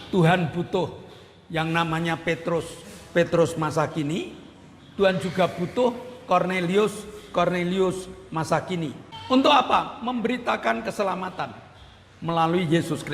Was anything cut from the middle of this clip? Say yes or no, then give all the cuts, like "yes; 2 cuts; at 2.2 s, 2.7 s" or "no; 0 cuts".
yes; 1 cut; at 9.1 s